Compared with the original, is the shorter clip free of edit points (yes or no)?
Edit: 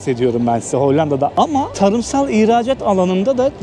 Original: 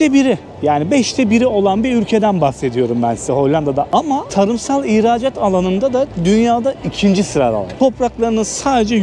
yes